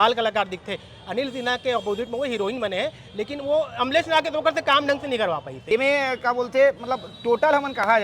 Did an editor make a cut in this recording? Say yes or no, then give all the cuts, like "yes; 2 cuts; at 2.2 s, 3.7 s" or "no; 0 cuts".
yes; 1 cut; at 5.6 s